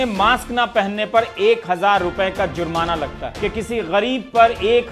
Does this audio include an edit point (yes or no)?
yes